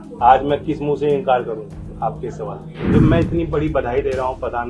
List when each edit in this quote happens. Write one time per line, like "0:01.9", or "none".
0:02.7

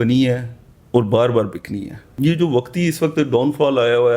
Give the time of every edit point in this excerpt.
0:02.0

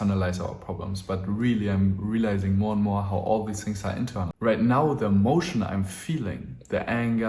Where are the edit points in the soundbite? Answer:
0:04.3

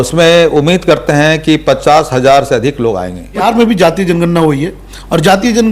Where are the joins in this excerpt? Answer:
0:03.4

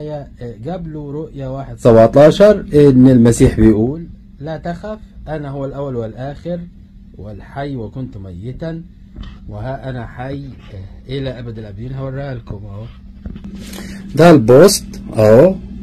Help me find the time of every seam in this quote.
0:14.5

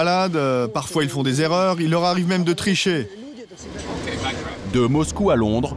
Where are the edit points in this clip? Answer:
0:04.6

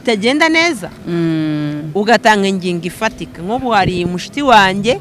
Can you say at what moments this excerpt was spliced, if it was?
none

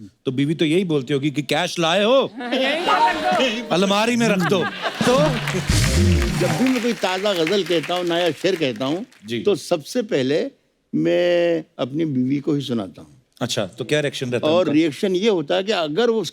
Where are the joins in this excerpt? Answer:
0:06.4

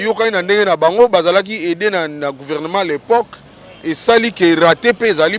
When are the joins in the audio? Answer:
none

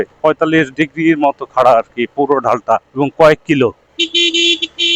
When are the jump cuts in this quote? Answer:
0:02.9
0:03.8

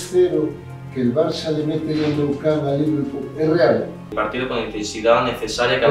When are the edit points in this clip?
0:04.1

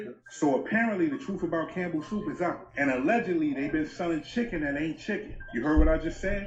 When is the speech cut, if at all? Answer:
none

